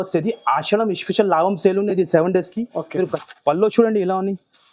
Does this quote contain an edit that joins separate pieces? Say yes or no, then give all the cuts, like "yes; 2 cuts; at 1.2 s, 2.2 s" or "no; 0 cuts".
yes; 1 cut; at 3.2 s